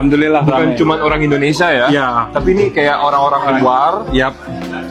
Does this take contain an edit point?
no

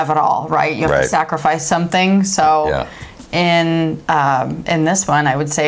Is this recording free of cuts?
yes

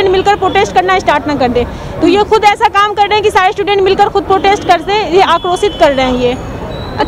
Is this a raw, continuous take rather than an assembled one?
yes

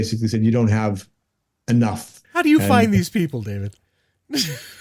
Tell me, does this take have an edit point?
yes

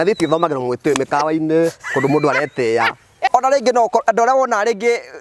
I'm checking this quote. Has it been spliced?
yes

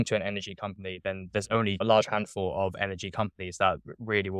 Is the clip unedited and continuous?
no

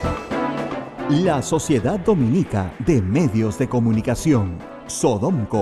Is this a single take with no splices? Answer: no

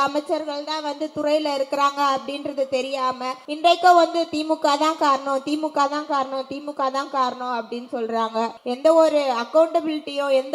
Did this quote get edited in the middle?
yes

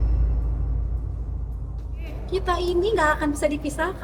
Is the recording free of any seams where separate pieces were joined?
yes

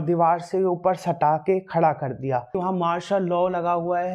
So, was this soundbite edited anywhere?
yes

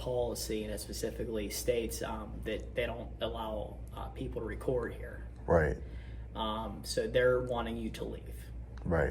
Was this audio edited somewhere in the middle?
no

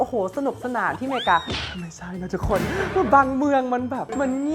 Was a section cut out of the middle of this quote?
no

